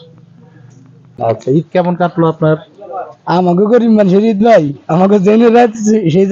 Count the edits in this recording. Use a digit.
1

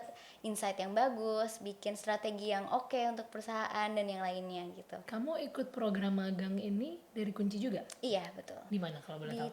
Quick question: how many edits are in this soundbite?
2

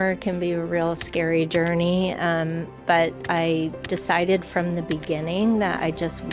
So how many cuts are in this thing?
1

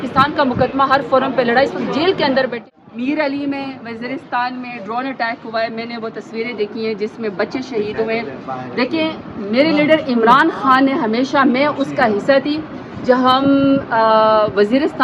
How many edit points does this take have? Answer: 1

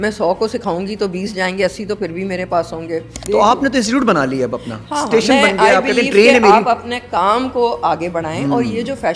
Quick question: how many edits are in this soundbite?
1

